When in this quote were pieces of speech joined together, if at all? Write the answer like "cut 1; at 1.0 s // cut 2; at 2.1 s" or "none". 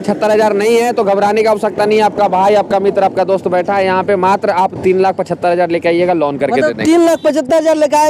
none